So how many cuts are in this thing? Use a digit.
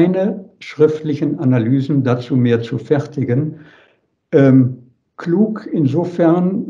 0